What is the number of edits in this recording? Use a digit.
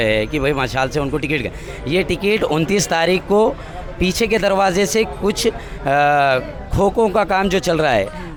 0